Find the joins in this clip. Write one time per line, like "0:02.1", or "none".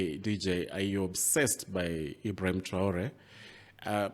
none